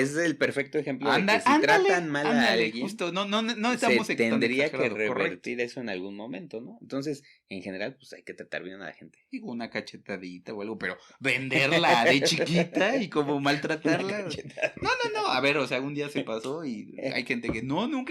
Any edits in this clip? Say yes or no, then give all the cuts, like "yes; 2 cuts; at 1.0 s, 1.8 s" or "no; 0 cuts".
no; 0 cuts